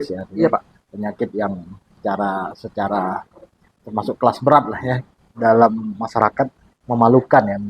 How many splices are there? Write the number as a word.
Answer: two